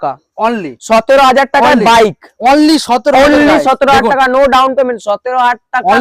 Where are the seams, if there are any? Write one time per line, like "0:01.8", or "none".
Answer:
none